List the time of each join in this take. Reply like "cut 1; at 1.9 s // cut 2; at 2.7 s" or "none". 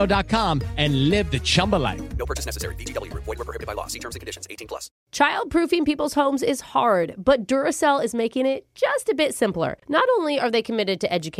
cut 1; at 4.9 s